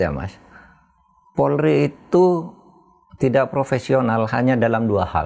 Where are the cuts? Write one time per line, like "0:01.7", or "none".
none